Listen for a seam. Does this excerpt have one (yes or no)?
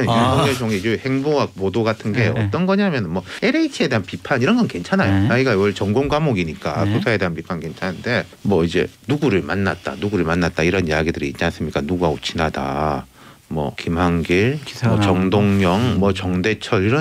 yes